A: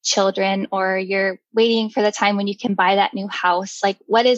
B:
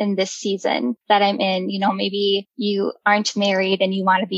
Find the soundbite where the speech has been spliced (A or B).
B